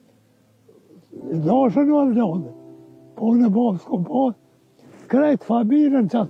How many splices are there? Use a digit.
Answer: 0